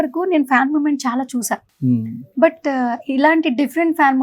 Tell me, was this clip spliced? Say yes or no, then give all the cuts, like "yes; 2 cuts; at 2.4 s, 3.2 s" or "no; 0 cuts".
no; 0 cuts